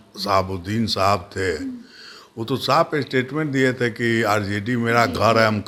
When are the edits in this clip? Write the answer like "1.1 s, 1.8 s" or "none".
none